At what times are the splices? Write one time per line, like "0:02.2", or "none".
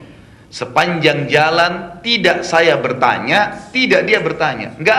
none

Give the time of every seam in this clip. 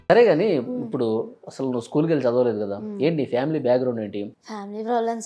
0:04.3

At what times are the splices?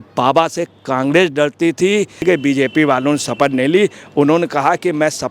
0:02.2

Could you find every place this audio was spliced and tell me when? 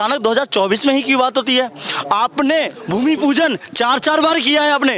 0:02.8

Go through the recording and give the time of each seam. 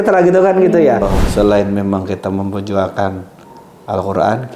0:01.2

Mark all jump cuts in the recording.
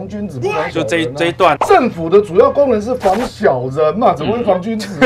0:01.6

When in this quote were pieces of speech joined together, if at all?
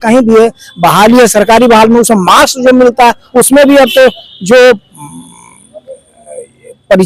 none

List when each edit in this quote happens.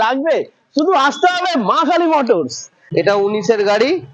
0:02.8

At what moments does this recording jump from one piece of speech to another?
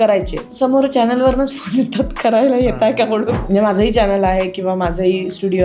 0:03.4

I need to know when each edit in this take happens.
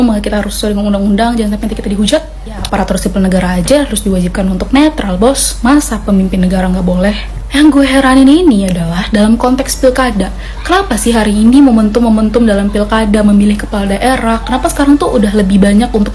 0:02.7

